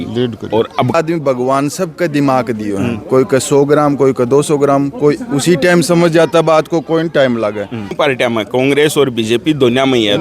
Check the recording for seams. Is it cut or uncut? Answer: cut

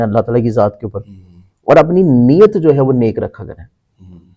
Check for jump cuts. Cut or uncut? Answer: uncut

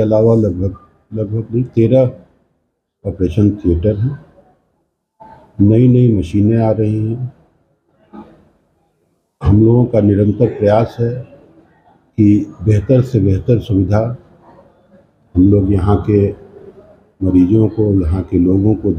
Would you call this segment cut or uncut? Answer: uncut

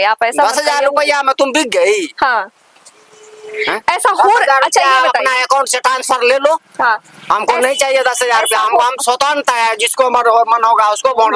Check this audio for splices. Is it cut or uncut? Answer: uncut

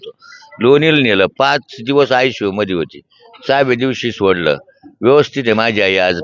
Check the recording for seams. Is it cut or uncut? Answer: uncut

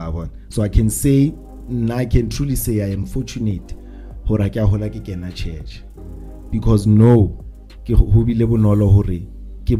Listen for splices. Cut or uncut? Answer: uncut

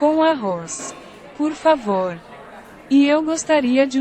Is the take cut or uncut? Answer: uncut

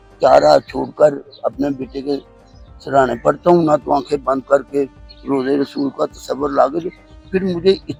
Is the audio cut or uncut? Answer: uncut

